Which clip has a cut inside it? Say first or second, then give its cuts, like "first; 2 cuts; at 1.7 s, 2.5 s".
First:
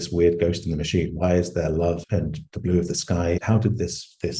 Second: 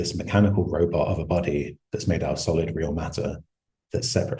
first; 2 cuts; at 2.0 s, 3.4 s